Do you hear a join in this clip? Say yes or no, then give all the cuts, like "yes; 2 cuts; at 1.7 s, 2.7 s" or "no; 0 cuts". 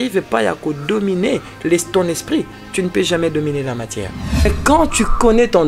yes; 1 cut; at 4.5 s